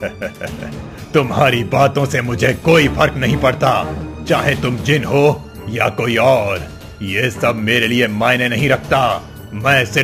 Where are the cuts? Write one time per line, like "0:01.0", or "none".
none